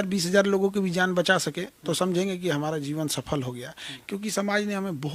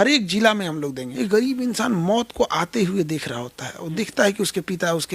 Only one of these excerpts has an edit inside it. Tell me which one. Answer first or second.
second